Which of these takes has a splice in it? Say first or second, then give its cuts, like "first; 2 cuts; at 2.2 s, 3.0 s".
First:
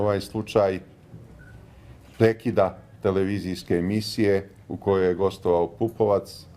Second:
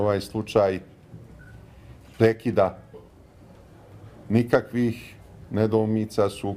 first; 1 cut; at 3.0 s